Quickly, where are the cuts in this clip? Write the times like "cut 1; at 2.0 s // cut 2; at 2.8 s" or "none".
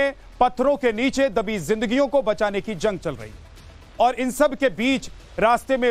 cut 1; at 2.8 s